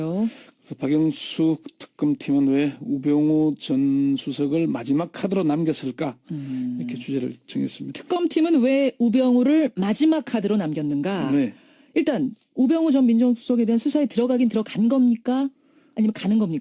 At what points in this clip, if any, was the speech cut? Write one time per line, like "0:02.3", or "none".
none